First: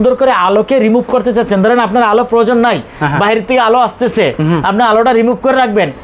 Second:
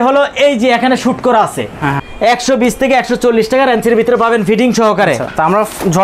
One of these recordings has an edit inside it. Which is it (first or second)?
second